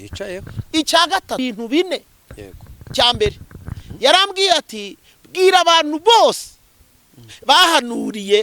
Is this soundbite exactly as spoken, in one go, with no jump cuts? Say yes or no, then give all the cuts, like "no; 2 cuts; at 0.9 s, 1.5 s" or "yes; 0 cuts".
no; 1 cut; at 1.4 s